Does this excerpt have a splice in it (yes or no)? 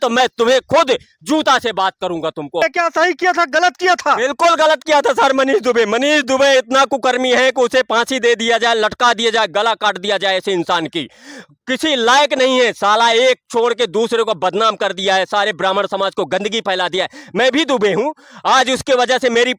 yes